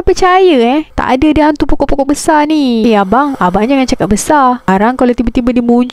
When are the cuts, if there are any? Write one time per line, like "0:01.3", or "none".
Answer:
0:00.9
0:02.8